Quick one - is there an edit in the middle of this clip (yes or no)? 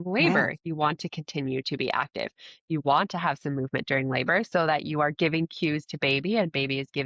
no